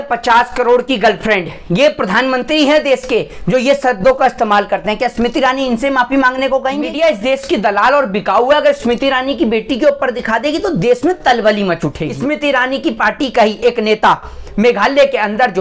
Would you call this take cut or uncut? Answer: cut